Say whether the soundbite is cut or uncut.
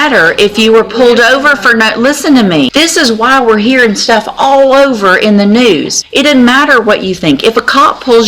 cut